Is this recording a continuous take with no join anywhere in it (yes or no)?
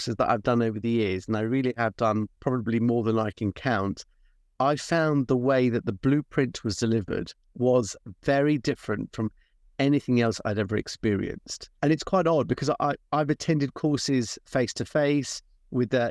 no